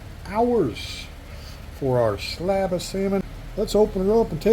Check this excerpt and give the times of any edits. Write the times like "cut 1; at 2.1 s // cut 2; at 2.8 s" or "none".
cut 1; at 3.2 s

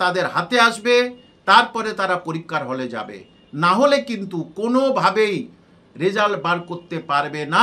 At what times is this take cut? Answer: none

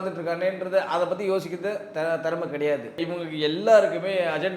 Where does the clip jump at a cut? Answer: cut 1; at 3.1 s

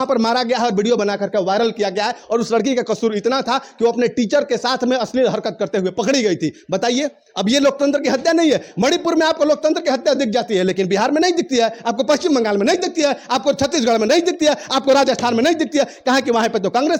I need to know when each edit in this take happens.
none

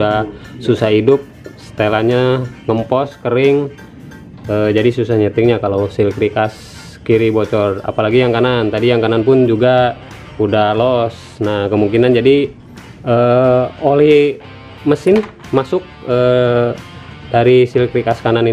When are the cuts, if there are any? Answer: none

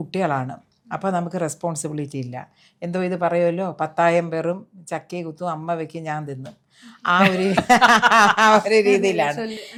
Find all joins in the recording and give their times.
none

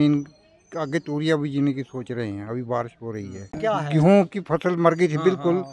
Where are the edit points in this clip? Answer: cut 1; at 3.6 s

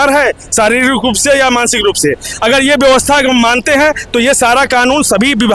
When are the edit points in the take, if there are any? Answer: none

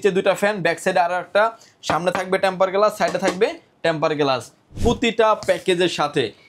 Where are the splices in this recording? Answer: cut 1; at 4.6 s

